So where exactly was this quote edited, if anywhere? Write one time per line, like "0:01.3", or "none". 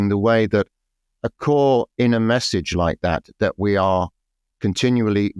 none